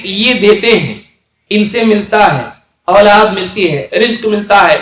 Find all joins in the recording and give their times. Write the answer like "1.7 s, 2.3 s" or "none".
none